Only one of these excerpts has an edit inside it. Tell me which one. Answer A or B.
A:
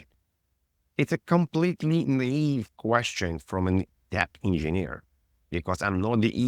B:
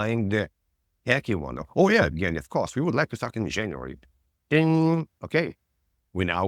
A